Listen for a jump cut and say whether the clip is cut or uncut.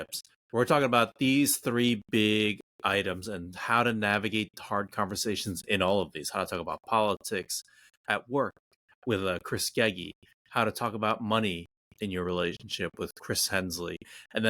uncut